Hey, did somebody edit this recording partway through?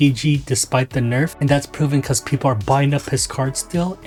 no; 0 cuts

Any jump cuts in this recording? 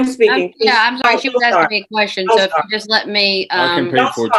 no; 0 cuts

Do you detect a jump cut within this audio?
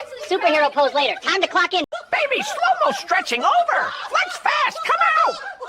yes; 1 cut; at 2.0 s

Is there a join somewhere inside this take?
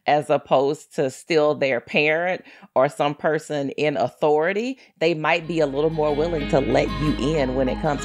no; 0 cuts

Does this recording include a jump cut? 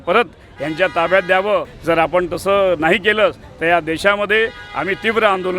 yes; 1 cut; at 1.7 s

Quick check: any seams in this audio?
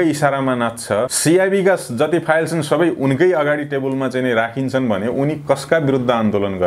yes; 1 cut; at 1.1 s

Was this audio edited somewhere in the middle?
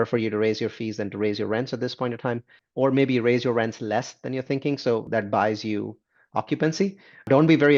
no; 0 cuts

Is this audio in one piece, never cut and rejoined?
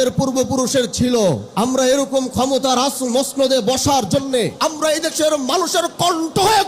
no; 2 cuts; at 1.5 s, 4.5 s

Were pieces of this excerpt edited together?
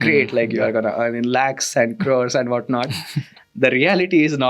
no; 0 cuts

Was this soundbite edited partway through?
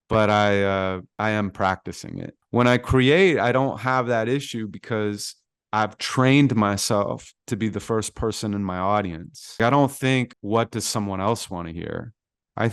yes; 4 cuts; at 1.1 s, 2.3 s, 9.6 s, 10.4 s

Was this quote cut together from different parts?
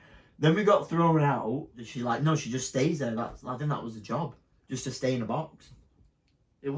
yes; 1 cut; at 1.9 s

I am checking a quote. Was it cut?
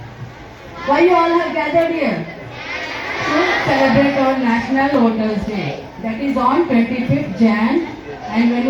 no; 0 cuts

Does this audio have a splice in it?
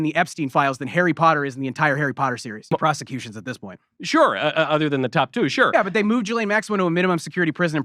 yes; 1 cut; at 2.7 s

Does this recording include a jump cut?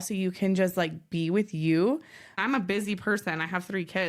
yes; 1 cut; at 2.4 s

